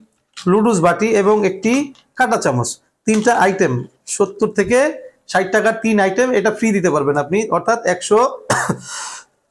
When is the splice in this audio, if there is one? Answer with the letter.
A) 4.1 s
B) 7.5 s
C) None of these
C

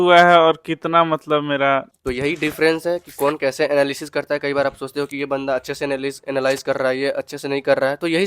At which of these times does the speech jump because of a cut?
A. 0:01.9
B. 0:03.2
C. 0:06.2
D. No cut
A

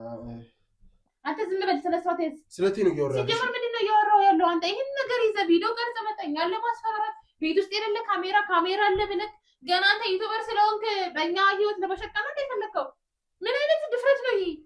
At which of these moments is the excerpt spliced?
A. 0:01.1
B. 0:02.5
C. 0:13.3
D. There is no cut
A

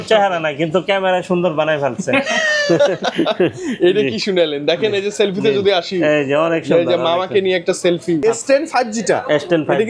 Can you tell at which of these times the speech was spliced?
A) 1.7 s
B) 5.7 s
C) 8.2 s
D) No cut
C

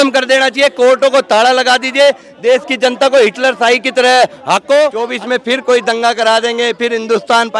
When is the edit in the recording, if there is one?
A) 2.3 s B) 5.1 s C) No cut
B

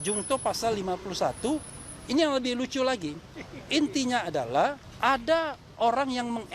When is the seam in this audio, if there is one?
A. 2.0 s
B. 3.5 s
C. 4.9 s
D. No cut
C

